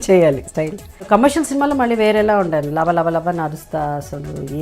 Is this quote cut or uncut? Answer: cut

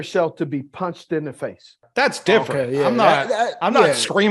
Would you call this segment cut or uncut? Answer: cut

